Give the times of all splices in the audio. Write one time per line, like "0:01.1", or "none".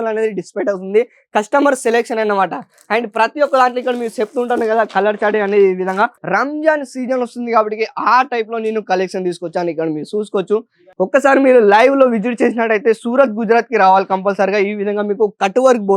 0:06.2
0:10.8